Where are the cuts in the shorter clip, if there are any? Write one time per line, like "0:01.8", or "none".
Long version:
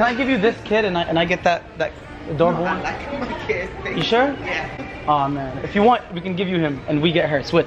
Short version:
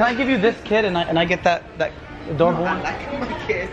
none